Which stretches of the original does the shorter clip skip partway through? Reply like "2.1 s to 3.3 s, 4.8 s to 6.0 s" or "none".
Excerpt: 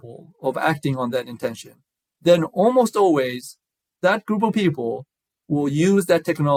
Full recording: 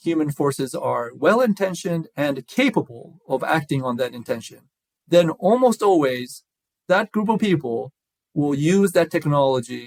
none